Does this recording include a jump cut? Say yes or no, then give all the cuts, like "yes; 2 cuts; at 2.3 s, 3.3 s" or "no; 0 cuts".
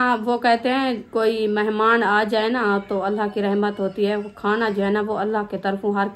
no; 0 cuts